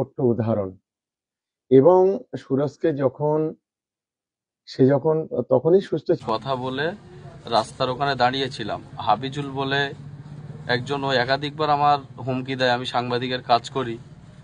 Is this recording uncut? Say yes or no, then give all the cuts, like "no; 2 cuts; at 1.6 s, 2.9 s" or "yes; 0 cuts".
no; 1 cut; at 6.2 s